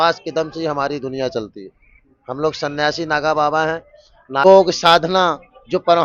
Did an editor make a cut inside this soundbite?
yes; 1 cut; at 4.4 s

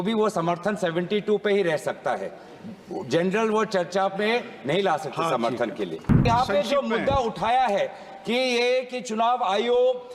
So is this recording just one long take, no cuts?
no; 1 cut; at 6.2 s

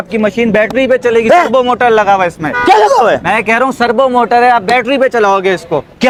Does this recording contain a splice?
no; 0 cuts

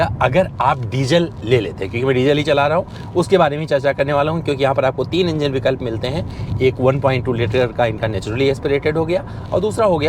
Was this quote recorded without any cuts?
yes; 0 cuts

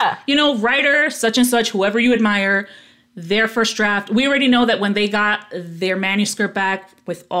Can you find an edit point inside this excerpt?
no; 0 cuts

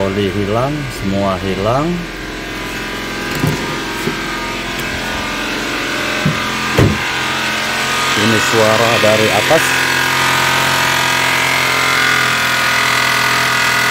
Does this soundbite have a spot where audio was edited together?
no; 0 cuts

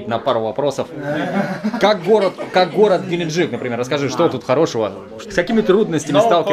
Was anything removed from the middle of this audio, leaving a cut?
yes; 1 cut; at 5.1 s

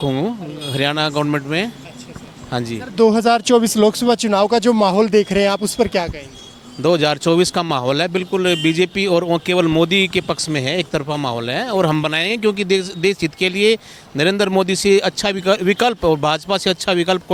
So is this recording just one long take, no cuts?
yes; 0 cuts

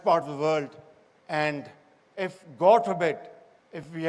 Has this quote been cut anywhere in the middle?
yes; 1 cut; at 2.7 s

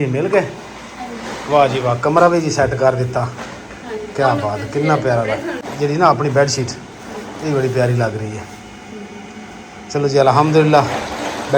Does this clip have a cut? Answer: yes; 1 cut; at 5.6 s

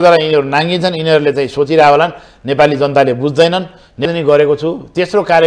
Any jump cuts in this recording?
yes; 1 cut; at 4.0 s

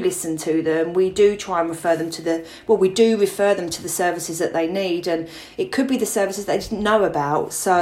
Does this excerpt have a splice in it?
no; 0 cuts

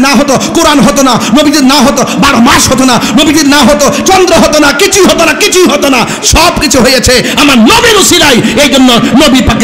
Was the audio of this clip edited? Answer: no; 0 cuts

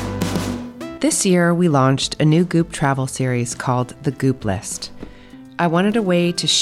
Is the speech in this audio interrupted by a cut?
yes; 1 cut; at 0.9 s

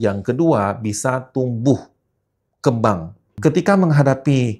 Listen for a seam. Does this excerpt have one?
yes; 1 cut; at 3.2 s

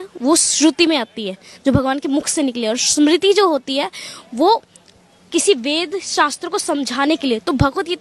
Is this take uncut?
yes; 0 cuts

